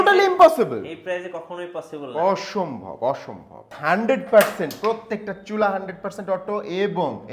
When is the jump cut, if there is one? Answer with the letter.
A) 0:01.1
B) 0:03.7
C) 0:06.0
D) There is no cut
B